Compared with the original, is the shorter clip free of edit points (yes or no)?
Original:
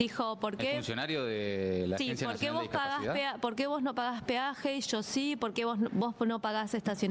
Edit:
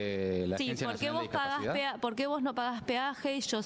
yes